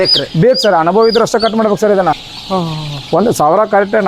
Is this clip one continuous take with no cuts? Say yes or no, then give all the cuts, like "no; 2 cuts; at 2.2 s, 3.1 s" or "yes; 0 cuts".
no; 1 cut; at 2.3 s